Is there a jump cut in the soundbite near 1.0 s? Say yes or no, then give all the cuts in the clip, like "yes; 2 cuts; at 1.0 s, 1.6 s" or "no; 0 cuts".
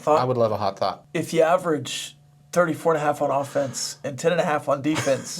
yes; 1 cut; at 1.0 s